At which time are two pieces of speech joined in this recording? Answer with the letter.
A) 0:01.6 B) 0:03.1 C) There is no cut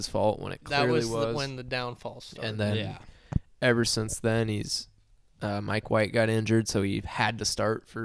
C